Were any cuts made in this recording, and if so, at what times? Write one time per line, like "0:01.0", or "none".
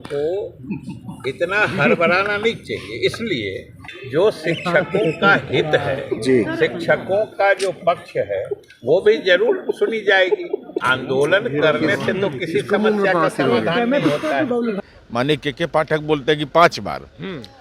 0:03.9
0:10.8
0:14.8